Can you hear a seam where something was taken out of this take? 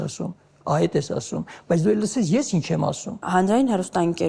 yes; 1 cut; at 3.1 s

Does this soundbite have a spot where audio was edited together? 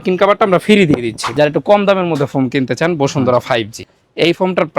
yes; 2 cuts; at 1.2 s, 3.7 s

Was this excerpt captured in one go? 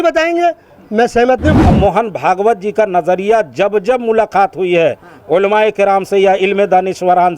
no; 1 cut; at 1.7 s

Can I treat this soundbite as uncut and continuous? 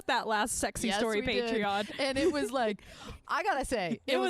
no; 1 cut; at 3.2 s

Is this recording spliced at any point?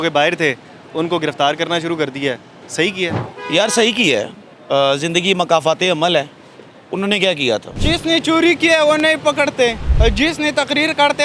yes; 3 cuts; at 3.3 s, 7.7 s, 9.9 s

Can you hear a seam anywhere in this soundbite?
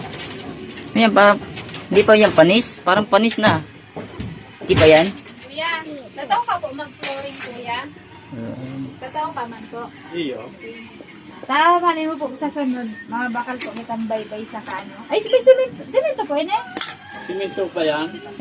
no; 0 cuts

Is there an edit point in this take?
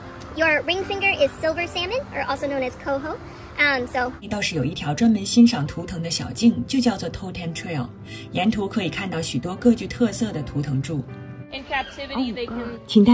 yes; 2 cuts; at 4.3 s, 11.6 s

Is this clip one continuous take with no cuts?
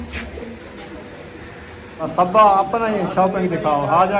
no; 1 cut; at 2.1 s

